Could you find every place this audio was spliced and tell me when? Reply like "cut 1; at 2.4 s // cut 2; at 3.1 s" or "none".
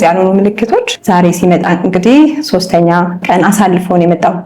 cut 1; at 0.9 s